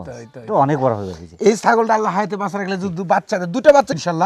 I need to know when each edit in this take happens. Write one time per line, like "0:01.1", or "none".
none